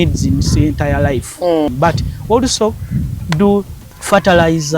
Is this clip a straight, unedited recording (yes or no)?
no